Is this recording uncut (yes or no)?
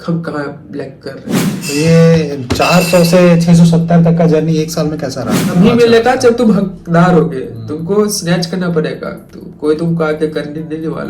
no